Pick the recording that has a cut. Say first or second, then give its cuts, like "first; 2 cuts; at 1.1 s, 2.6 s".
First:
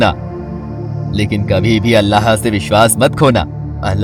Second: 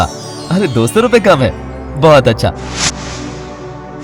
second; 1 cut; at 2.5 s